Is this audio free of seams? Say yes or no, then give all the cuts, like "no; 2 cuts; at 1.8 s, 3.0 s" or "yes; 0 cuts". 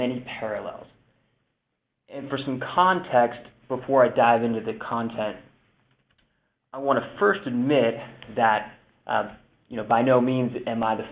no; 1 cut; at 5.2 s